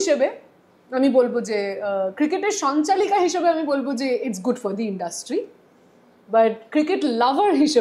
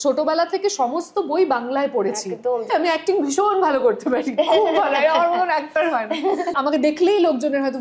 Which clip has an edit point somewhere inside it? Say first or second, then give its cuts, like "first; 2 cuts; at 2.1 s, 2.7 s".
second; 2 cuts; at 2.7 s, 6.6 s